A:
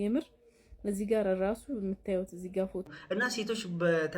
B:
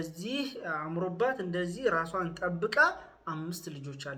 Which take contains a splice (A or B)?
A